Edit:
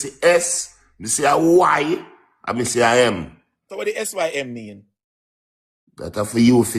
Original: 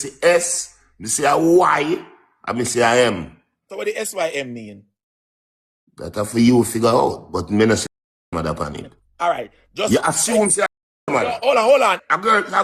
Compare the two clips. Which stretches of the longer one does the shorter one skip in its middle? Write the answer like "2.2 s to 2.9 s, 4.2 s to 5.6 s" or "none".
none

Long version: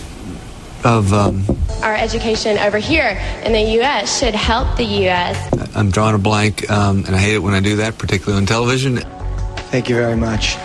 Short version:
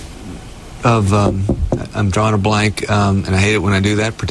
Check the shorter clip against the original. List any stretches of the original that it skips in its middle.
1.6 s to 5.4 s

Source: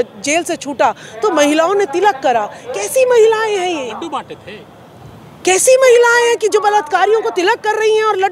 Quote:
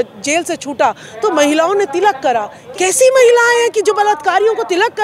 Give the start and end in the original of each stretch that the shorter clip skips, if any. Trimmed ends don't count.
2.6 s to 5.3 s

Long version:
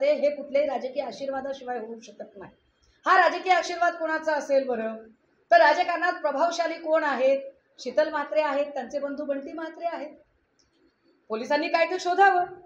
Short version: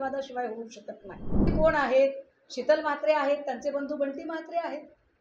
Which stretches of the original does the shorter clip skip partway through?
2.8 s to 6.8 s

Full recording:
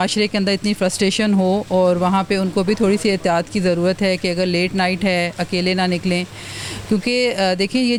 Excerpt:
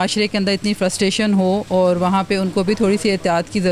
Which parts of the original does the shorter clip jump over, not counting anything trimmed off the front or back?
none

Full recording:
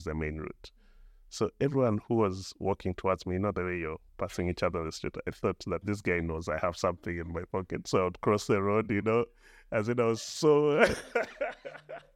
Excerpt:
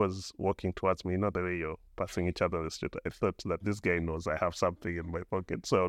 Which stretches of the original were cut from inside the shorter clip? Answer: none

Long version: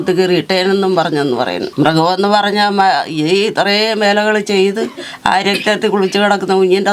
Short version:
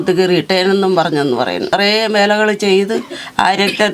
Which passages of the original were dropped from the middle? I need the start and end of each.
1.7 s to 3.6 s

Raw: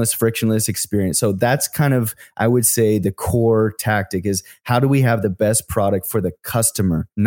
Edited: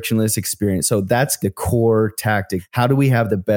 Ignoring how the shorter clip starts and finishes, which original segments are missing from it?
1.7 s to 3.0 s, 4.2 s to 4.5 s

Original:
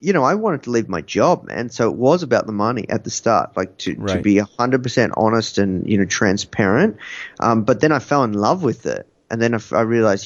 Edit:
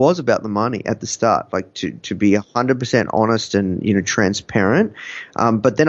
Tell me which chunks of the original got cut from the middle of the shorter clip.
none

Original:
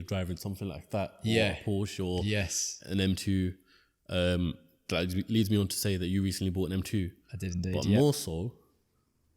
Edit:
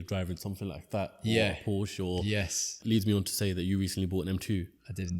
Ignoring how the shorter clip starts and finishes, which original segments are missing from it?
2.8 s to 5.2 s

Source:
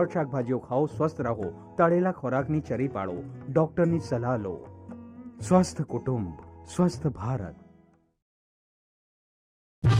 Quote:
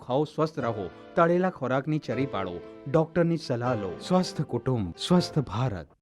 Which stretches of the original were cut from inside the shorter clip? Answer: 4.6 s to 5.3 s, 6.3 s to 6.6 s

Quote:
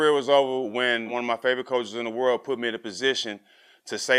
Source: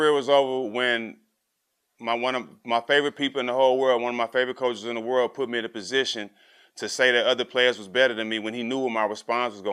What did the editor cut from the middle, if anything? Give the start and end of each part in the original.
1.1 s to 4.0 s

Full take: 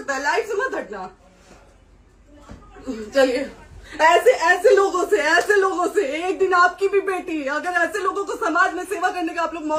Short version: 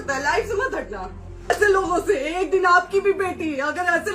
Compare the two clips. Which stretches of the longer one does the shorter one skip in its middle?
1.5 s to 5.4 s

